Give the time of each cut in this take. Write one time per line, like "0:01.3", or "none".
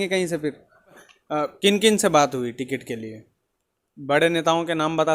0:01.1